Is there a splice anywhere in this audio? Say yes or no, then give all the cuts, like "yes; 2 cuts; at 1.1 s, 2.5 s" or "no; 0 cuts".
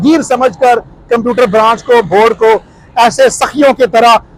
no; 0 cuts